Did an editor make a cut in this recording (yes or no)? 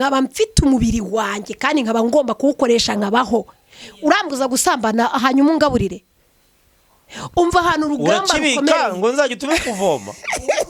no